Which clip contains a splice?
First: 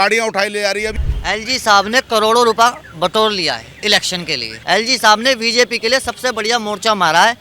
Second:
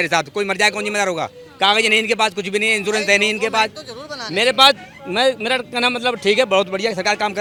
first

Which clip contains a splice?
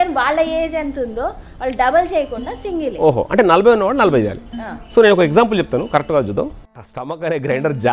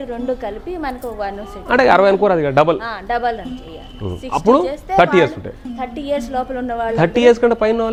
first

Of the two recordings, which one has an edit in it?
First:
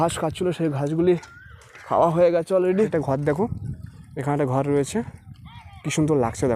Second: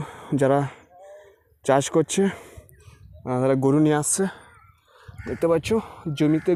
first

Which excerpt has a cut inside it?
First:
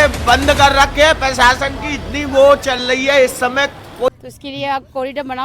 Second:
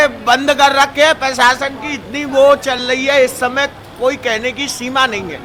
first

